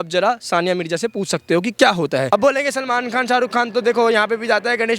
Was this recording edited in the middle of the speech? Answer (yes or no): yes